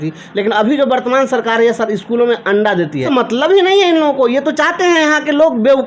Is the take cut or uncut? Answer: cut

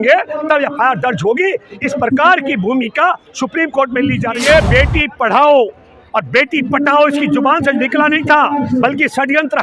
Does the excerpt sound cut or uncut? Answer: cut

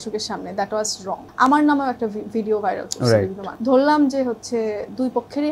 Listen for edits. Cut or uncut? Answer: cut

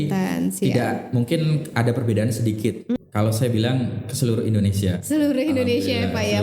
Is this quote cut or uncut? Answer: cut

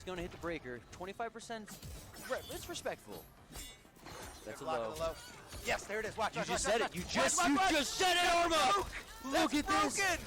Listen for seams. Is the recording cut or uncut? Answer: uncut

